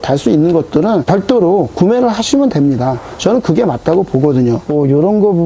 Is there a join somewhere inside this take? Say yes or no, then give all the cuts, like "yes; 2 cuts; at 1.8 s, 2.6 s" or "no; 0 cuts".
yes; 2 cuts; at 1.0 s, 4.6 s